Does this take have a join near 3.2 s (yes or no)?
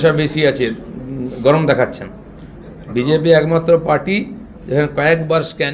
no